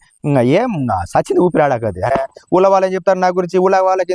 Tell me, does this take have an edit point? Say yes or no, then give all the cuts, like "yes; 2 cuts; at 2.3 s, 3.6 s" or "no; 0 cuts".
yes; 1 cut; at 2.1 s